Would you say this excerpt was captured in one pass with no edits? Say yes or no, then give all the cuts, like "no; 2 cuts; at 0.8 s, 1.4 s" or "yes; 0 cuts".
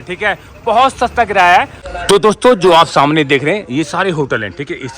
no; 1 cut; at 1.8 s